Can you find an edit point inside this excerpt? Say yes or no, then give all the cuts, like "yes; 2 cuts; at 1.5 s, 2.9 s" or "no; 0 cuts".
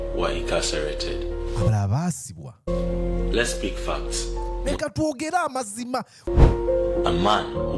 yes; 1 cut; at 6.3 s